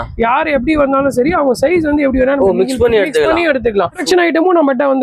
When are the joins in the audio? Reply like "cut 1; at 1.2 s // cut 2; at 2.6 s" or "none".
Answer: cut 1; at 4.0 s